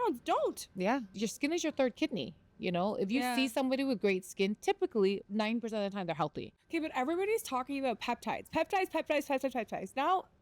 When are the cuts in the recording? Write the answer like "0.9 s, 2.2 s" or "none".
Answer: 1.1 s, 5.3 s, 6.5 s